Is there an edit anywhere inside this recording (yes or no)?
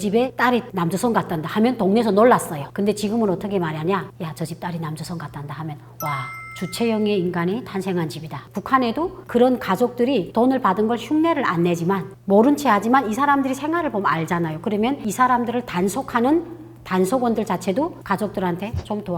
yes